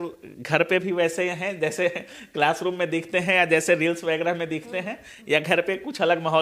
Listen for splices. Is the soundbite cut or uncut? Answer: uncut